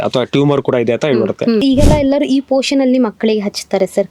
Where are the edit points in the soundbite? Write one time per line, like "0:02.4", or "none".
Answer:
0:01.6